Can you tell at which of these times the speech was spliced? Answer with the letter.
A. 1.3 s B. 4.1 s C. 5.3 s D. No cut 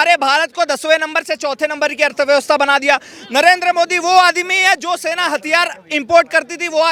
D